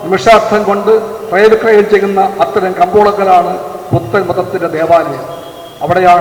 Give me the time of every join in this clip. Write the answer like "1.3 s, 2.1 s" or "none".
none